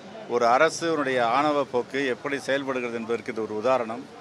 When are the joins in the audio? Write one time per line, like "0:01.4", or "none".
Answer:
0:01.0